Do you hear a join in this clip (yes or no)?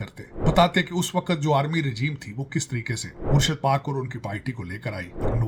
no